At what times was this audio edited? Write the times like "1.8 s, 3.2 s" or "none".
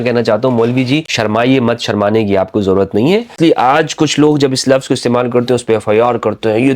1.1 s, 3.4 s